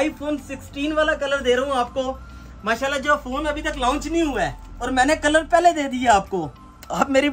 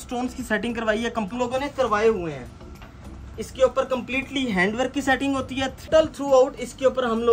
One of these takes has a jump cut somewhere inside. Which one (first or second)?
second